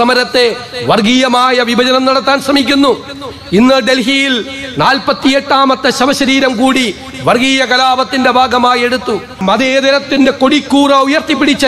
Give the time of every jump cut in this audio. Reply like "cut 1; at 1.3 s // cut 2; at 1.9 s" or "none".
cut 1; at 9.4 s